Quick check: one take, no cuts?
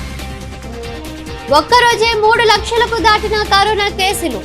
no; 1 cut; at 1.1 s

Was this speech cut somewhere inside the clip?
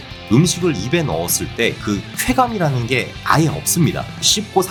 no; 0 cuts

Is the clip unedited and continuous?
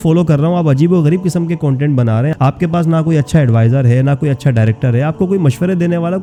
yes; 0 cuts

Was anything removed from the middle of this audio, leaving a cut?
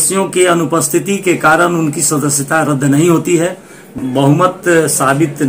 yes; 1 cut; at 3.9 s

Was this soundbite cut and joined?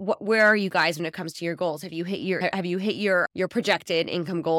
no; 0 cuts

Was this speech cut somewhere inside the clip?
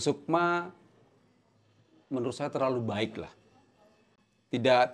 no; 0 cuts

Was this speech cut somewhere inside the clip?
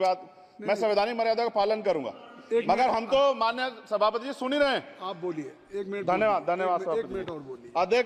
no; 0 cuts

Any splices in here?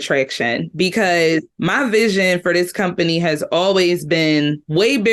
yes; 1 cut; at 1.5 s

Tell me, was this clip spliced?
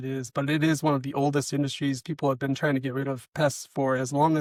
no; 0 cuts

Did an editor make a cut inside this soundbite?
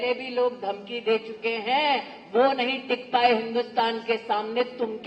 no; 0 cuts

